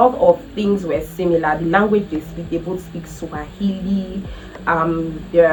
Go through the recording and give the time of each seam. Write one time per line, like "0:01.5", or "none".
none